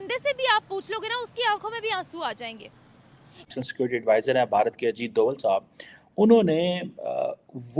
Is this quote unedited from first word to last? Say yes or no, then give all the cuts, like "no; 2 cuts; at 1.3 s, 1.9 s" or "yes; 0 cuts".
no; 1 cut; at 3.5 s